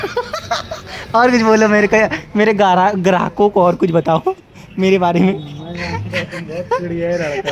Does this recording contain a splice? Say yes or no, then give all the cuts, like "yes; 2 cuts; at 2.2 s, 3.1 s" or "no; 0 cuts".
no; 0 cuts